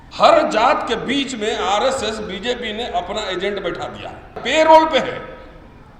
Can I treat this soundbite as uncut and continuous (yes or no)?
no